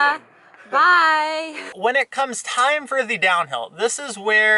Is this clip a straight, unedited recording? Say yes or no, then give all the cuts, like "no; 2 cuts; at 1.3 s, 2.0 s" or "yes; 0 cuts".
no; 1 cut; at 1.7 s